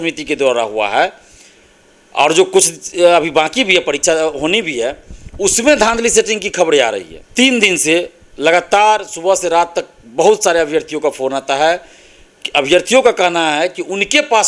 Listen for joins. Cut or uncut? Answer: cut